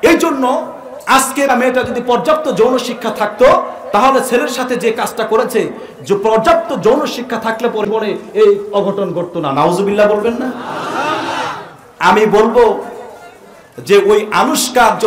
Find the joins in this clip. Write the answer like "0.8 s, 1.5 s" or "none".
1.5 s, 7.8 s